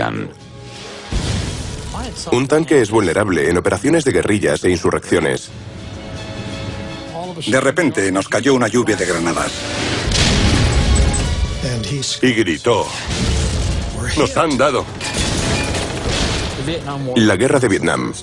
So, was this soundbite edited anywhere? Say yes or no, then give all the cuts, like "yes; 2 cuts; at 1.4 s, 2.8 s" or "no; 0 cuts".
no; 0 cuts